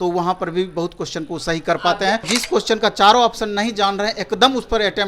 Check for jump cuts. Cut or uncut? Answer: cut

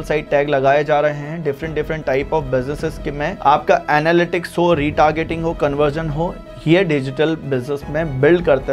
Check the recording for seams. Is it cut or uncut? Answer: uncut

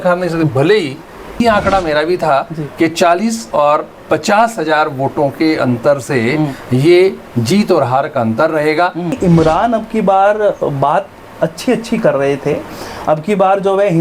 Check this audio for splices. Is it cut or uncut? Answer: cut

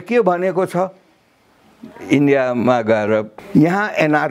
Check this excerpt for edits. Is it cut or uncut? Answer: cut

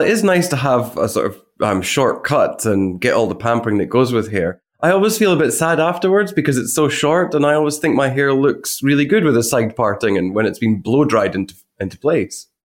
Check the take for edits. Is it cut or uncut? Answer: cut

